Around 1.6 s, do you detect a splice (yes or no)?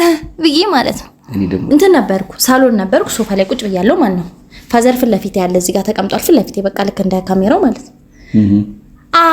yes